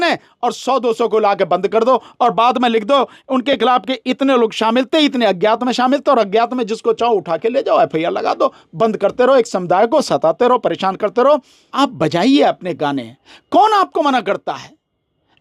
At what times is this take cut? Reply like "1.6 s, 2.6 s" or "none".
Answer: 11.6 s